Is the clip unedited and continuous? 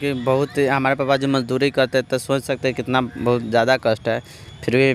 yes; 0 cuts

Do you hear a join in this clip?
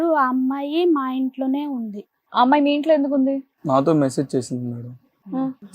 yes; 1 cut; at 3.5 s

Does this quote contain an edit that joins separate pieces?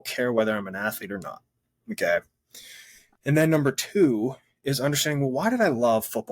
no; 0 cuts

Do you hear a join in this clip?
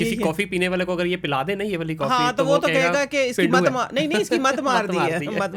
no; 0 cuts

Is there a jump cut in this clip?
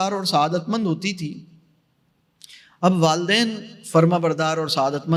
no; 0 cuts

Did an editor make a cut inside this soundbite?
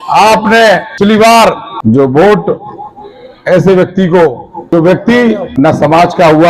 yes; 4 cuts; at 1.0 s, 1.7 s, 4.7 s, 5.5 s

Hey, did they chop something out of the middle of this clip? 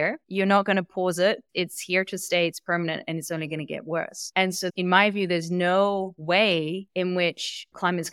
yes; 1 cut; at 4.7 s

